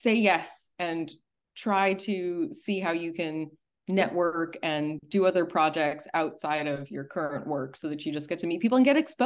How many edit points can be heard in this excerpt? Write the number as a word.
zero